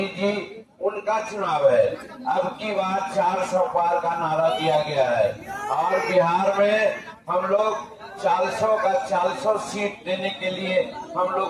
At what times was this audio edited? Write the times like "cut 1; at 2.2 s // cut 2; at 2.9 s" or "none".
none